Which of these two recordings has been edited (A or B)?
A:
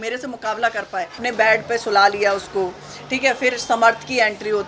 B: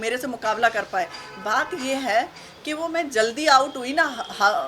A